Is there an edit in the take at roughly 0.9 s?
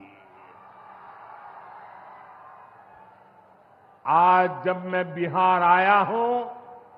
no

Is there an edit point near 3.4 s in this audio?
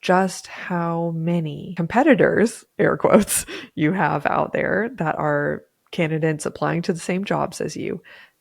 no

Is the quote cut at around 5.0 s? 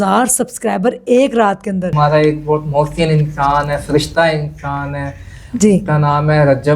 no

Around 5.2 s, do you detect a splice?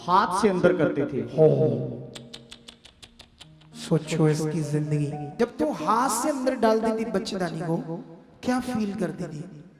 yes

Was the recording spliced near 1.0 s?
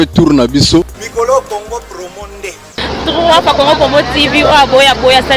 yes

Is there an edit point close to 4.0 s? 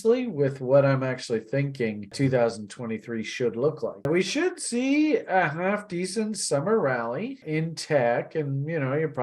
no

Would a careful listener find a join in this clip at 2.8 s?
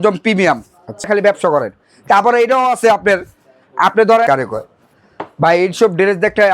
no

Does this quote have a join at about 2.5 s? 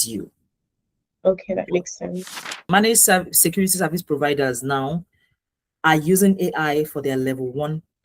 yes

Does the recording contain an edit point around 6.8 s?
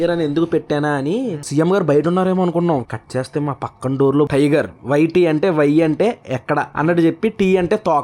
no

